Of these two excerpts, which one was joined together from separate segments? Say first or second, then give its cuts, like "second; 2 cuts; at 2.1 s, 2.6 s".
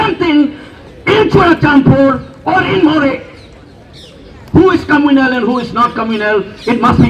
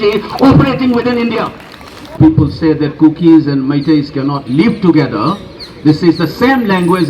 second; 1 cut; at 2.2 s